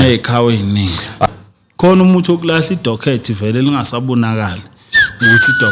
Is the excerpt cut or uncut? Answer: cut